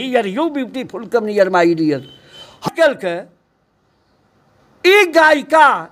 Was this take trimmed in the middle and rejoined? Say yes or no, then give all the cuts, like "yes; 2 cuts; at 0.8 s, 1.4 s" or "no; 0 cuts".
yes; 1 cut; at 2.7 s